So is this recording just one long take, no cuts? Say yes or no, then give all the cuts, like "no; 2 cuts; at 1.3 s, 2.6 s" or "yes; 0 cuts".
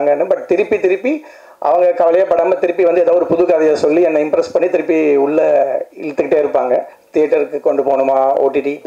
no; 1 cut; at 7.0 s